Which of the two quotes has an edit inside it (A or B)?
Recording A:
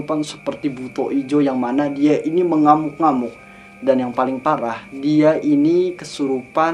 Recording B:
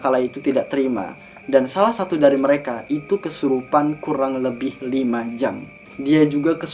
B